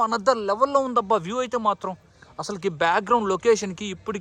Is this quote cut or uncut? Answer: uncut